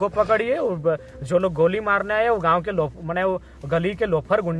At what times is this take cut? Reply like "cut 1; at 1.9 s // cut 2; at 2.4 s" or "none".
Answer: none